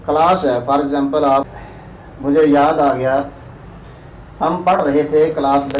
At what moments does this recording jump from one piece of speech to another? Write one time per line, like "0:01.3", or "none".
0:01.5